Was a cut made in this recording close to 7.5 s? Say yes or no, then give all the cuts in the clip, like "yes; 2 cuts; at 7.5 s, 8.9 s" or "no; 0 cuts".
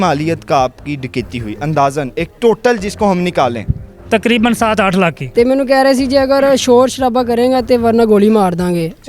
no; 1 cut; at 5.2 s